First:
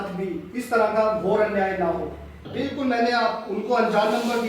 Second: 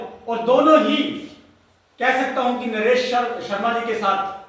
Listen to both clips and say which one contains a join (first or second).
first